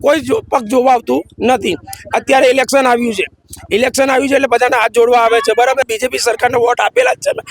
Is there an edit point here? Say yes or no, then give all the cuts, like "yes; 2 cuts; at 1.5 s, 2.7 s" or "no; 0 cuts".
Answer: yes; 1 cut; at 5.8 s